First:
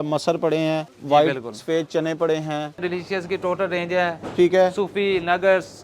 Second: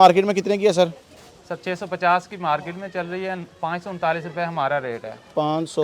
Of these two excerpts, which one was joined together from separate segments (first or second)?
first